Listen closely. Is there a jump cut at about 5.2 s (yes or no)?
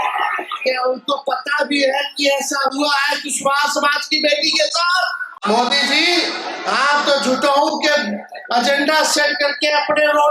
yes